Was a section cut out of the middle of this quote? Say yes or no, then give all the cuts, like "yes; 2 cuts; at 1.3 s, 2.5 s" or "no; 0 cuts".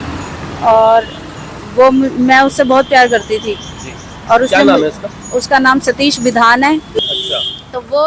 yes; 1 cut; at 7.0 s